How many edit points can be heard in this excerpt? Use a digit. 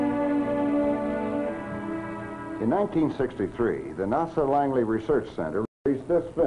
0